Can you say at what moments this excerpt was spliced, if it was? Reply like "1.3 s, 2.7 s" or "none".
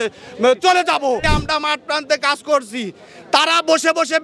1.2 s

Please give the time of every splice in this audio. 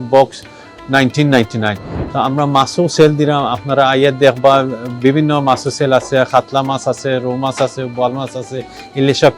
none

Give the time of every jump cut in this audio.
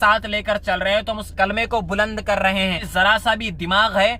2.8 s

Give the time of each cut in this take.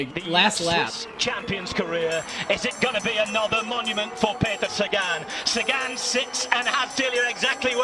1.0 s

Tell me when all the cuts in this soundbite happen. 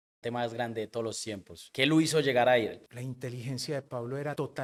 none

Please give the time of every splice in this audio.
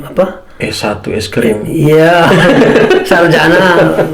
none

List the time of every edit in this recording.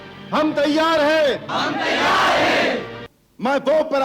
2.9 s

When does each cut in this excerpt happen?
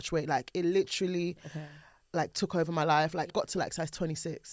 3.3 s

